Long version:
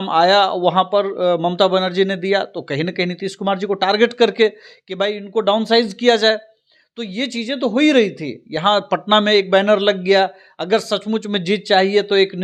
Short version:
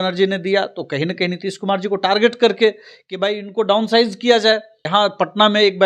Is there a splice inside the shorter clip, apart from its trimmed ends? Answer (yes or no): yes